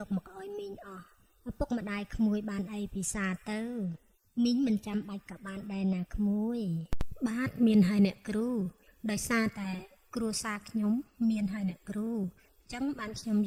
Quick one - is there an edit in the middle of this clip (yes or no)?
no